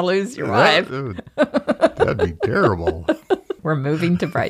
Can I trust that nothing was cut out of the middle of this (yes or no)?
yes